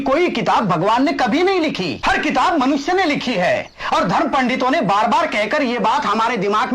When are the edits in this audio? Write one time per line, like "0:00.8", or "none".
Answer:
0:01.9